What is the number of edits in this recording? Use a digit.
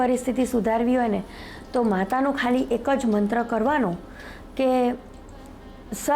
0